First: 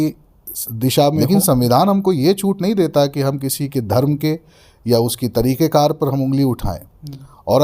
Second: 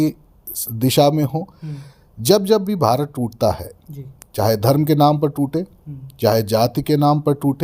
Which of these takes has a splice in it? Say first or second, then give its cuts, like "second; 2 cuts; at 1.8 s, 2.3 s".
first; 1 cut; at 1.2 s